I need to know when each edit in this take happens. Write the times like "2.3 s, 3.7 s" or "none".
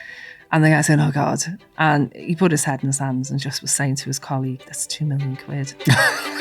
1.5 s